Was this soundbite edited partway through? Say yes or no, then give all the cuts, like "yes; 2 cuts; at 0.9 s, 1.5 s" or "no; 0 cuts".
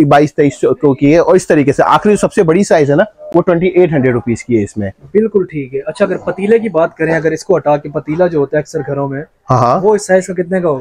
no; 0 cuts